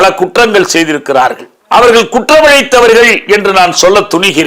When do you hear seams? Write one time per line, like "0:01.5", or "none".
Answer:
0:01.5